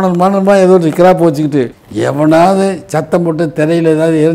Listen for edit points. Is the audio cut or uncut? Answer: cut